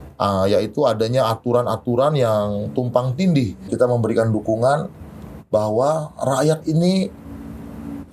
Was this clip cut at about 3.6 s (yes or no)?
yes